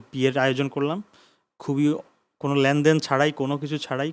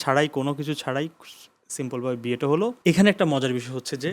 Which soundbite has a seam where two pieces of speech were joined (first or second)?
second